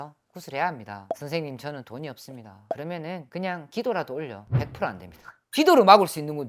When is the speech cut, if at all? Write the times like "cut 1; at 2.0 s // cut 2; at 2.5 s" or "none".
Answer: cut 1; at 1.0 s // cut 2; at 5.4 s